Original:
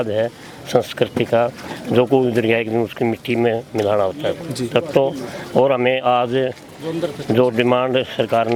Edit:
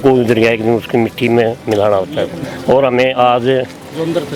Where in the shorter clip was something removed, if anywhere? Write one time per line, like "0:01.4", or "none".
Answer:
0:02.4